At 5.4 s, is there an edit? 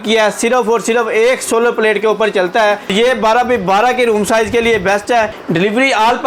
yes; 2 cuts; at 2.9 s, 5.4 s

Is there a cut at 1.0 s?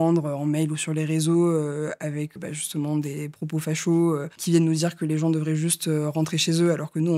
no; 2 cuts; at 2.4 s, 4.3 s

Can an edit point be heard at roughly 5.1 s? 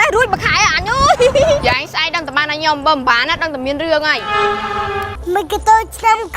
yes; 2 cuts; at 1.6 s, 5.1 s

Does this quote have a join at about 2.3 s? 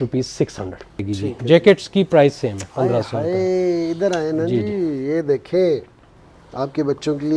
no; 1 cut; at 1.1 s

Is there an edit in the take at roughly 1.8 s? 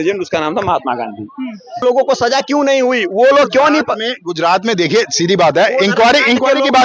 yes; 1 cut; at 1.8 s

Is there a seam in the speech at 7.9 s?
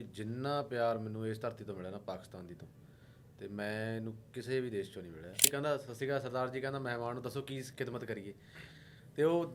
no; 1 cut; at 5.5 s

